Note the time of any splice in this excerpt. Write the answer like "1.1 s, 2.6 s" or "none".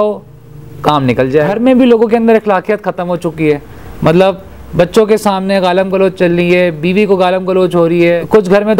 1.6 s